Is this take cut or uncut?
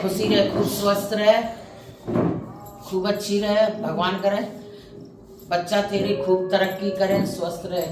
uncut